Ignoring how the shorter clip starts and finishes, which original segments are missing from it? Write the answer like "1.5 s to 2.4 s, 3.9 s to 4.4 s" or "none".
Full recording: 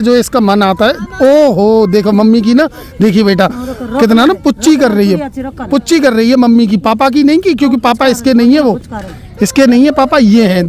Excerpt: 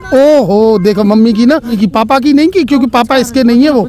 2.8 s to 6.7 s